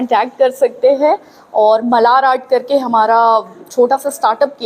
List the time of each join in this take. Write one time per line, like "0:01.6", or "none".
0:03.6